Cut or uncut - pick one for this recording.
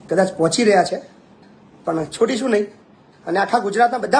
uncut